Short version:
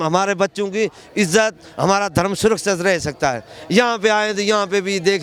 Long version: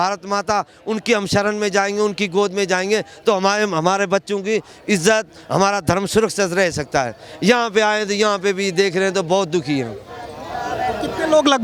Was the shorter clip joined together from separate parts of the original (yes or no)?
no